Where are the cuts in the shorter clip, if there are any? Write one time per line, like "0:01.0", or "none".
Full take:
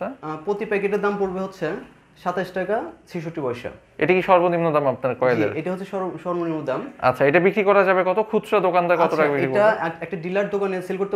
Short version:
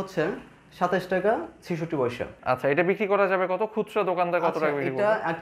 0:02.3